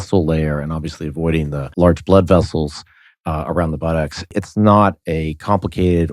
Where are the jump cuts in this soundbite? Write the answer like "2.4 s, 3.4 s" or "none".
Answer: 1.7 s, 4.3 s